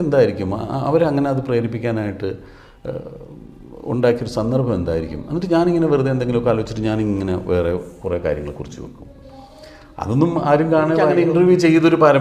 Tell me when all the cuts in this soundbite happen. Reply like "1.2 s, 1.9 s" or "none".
11.1 s